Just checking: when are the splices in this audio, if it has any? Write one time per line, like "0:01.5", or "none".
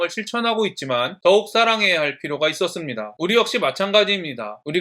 0:03.1